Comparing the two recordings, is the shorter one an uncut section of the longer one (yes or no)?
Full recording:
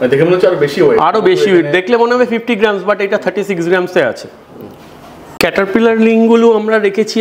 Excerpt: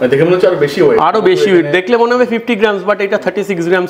yes